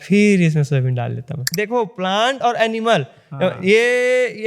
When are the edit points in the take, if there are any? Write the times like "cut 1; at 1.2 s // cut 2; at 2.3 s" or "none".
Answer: cut 1; at 1.5 s